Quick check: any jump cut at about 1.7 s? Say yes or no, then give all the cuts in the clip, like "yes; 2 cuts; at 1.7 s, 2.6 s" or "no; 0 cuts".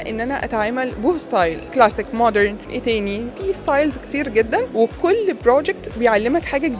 yes; 3 cuts; at 1.7 s, 2.9 s, 4.7 s